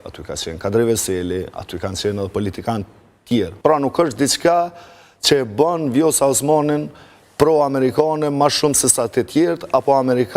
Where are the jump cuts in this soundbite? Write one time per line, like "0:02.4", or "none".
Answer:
0:03.5